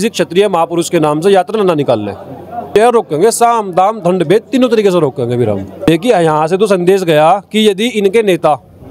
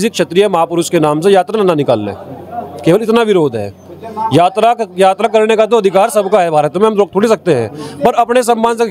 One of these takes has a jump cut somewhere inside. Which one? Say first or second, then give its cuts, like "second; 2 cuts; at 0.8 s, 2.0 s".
first; 2 cuts; at 2.7 s, 5.7 s